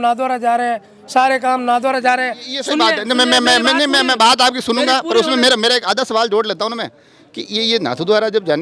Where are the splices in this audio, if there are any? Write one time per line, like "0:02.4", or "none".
none